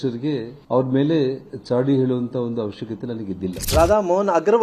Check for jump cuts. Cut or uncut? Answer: uncut